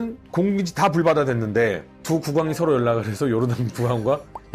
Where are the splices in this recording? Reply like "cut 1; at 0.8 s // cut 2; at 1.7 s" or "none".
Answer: none